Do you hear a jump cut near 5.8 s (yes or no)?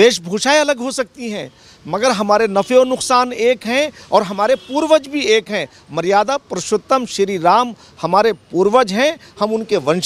no